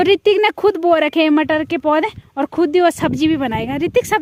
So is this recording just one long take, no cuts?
yes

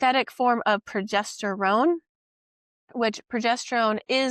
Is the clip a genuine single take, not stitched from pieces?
yes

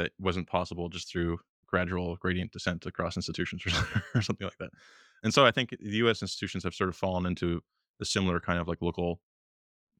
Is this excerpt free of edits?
yes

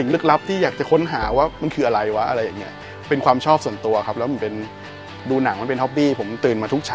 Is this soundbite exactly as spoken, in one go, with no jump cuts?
yes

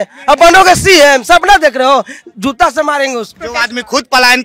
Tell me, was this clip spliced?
yes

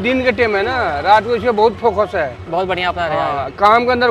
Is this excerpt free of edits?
yes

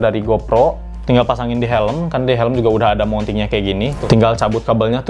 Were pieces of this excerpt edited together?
yes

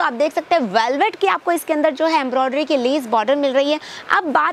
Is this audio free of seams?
yes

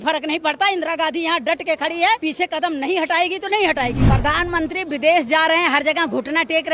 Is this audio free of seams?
no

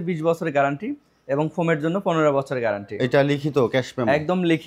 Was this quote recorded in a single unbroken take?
yes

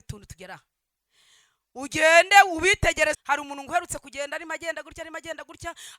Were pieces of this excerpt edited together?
yes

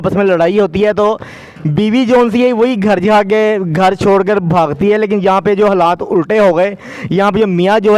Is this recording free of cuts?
yes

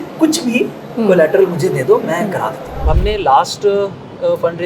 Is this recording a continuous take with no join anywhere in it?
no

